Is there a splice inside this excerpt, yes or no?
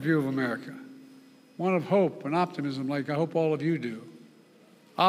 no